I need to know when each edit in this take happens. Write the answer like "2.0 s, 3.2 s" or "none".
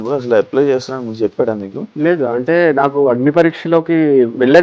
1.8 s

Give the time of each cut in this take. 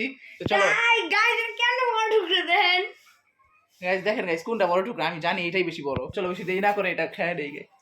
6.1 s

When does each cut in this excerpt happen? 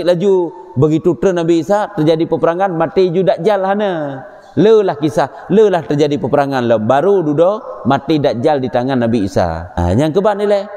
9.8 s

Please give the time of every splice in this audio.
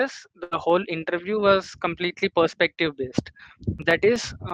none

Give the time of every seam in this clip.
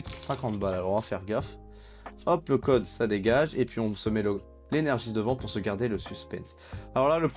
none

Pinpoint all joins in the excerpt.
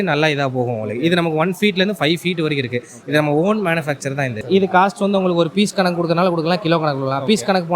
4.4 s

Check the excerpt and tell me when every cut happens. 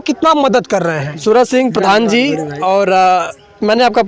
1.1 s

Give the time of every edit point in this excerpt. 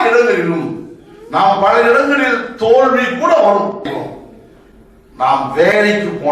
3.9 s

